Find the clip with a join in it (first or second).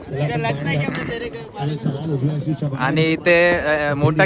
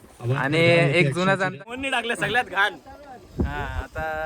second